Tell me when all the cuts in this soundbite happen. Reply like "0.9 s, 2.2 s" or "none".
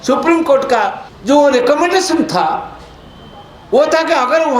1.1 s